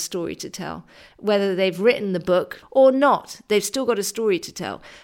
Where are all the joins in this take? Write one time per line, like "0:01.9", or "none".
0:02.6